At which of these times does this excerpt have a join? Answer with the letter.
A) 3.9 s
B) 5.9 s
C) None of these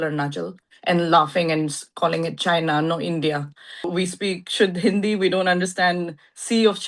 A